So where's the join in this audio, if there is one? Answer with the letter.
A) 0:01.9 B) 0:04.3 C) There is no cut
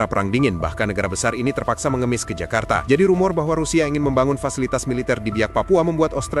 C